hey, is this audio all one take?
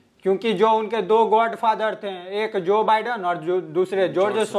yes; 0 cuts

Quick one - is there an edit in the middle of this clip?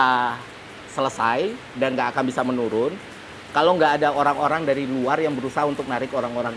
no; 0 cuts

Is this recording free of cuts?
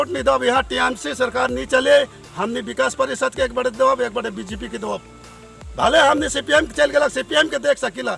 yes; 0 cuts

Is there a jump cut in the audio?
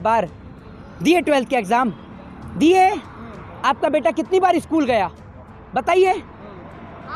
no; 0 cuts

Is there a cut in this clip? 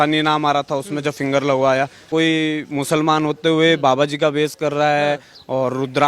yes; 1 cut; at 2.1 s

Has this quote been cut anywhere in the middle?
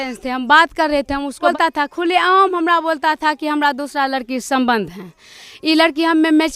yes; 1 cut; at 1.5 s

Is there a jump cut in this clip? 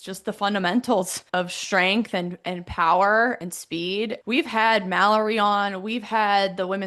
yes; 2 cuts; at 1.2 s, 4.2 s

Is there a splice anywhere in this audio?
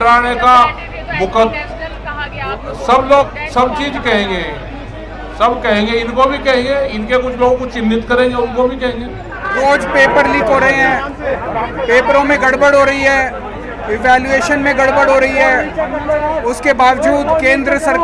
yes; 1 cut; at 9.4 s

